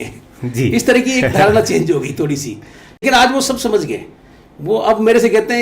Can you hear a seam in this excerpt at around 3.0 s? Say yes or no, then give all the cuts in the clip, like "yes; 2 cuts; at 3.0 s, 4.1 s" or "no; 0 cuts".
yes; 1 cut; at 3.0 s